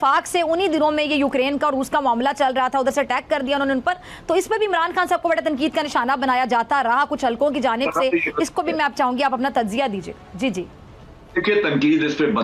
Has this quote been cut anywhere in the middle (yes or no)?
no